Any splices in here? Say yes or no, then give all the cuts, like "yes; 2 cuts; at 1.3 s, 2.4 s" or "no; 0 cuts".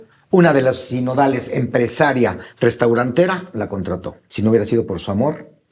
yes; 1 cut; at 4.2 s